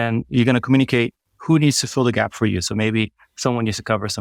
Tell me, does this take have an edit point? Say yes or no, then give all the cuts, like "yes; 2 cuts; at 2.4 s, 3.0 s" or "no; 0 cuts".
no; 0 cuts